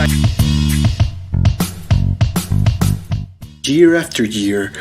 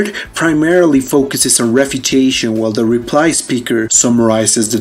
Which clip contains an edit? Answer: first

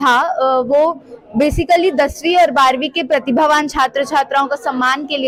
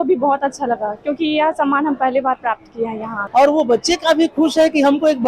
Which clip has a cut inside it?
second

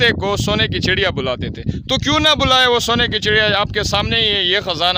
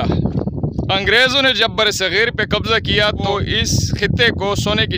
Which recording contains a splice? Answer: second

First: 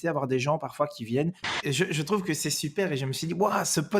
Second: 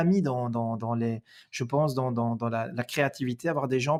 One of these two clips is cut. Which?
first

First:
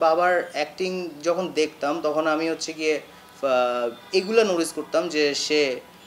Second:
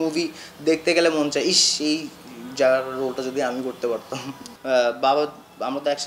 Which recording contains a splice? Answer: second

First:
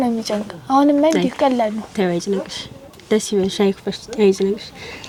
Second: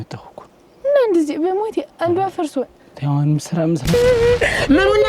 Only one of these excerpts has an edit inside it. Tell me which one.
second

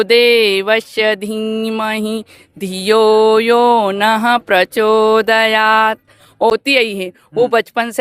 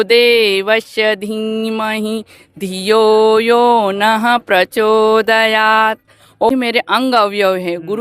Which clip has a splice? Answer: second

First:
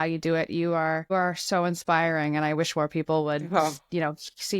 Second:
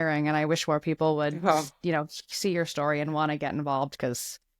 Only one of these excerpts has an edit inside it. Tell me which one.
first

